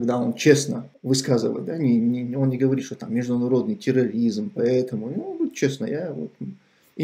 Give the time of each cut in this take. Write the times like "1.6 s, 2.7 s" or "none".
none